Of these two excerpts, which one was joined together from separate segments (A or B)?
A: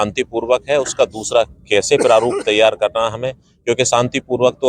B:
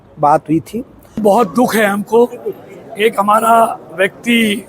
B